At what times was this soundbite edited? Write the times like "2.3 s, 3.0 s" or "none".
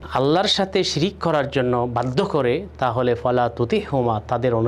none